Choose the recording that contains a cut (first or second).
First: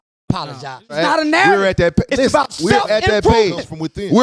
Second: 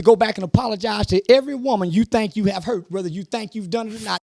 first